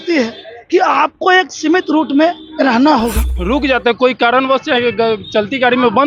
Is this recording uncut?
no; 1 cut; at 3.3 s

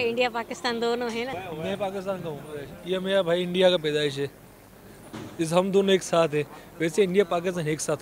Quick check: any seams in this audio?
yes; 1 cut; at 1.3 s

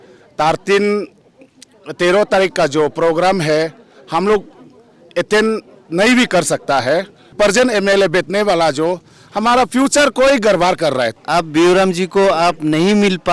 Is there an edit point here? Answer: yes; 2 cuts; at 7.3 s, 11.1 s

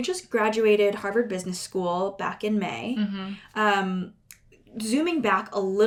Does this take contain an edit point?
no; 0 cuts

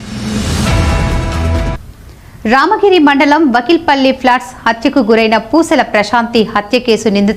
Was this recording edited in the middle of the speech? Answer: no; 0 cuts

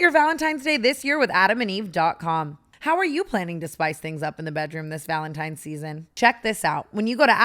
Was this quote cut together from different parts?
yes; 1 cut; at 6.0 s

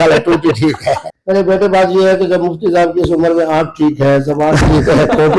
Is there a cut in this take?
yes; 1 cut; at 1.1 s

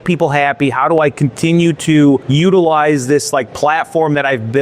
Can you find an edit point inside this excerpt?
yes; 1 cut; at 2.3 s

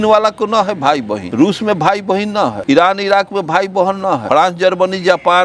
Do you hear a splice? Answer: yes; 3 cuts; at 1.2 s, 2.6 s, 4.2 s

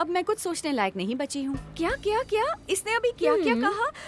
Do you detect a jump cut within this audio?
yes; 1 cut; at 1.7 s

